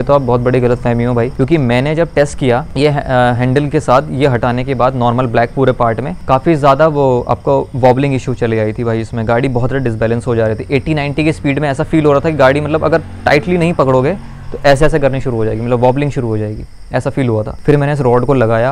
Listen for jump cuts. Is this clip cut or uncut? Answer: uncut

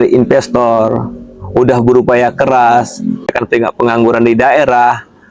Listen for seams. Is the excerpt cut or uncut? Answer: cut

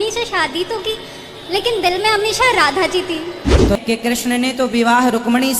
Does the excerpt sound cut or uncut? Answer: cut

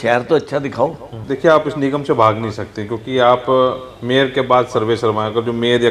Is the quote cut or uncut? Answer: cut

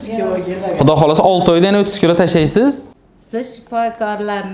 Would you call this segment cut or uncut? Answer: cut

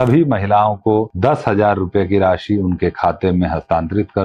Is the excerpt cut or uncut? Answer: cut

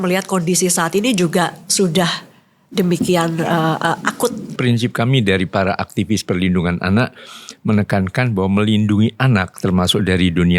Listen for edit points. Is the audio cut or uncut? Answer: cut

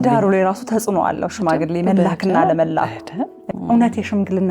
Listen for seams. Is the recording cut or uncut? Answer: cut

